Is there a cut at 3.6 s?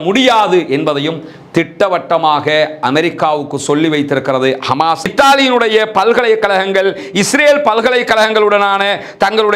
no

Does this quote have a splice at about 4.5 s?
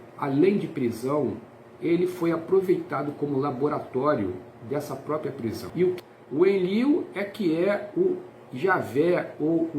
no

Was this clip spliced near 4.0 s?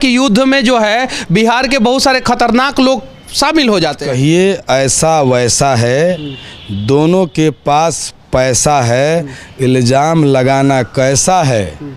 yes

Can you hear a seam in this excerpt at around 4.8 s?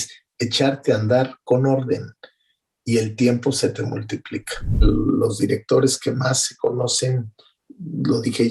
yes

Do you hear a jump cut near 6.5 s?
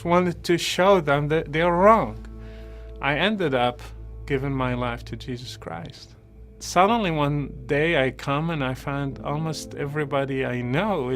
yes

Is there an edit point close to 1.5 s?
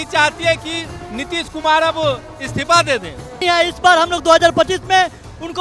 no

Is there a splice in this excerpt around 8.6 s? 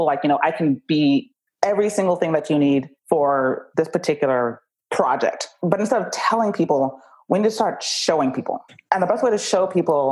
yes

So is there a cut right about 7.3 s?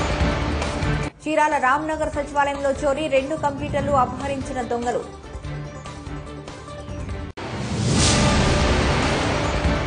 no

